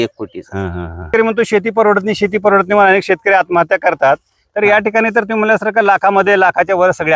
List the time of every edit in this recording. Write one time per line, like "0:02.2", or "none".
0:01.1